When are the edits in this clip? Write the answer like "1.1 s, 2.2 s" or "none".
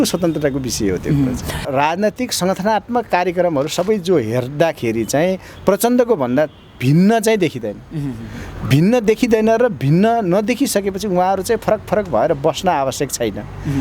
1.7 s